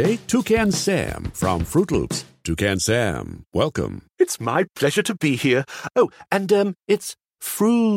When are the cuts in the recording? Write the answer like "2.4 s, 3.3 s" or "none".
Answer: none